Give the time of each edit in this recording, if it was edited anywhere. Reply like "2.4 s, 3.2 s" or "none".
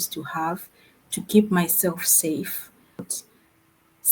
3.1 s